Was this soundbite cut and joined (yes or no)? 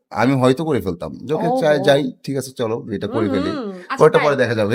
no